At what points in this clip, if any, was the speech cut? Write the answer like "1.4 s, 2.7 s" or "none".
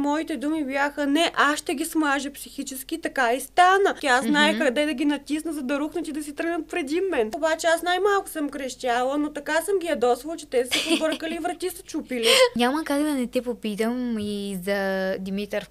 4.0 s, 7.3 s, 12.5 s